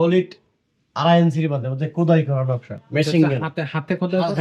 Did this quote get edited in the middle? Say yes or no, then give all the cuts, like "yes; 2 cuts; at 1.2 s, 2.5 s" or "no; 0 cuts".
no; 0 cuts